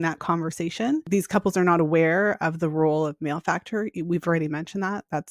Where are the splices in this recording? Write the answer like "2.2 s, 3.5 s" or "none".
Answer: 1.0 s

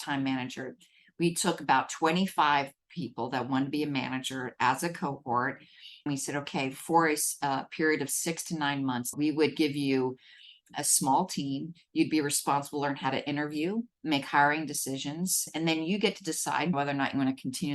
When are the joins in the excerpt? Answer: 6.1 s, 9.1 s, 10.7 s, 15.4 s, 16.7 s

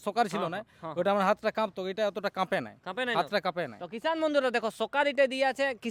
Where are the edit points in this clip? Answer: none

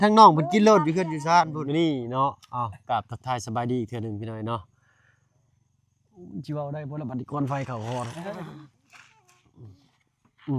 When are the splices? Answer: 1.6 s

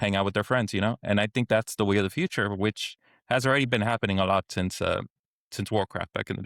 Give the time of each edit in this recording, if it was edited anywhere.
none

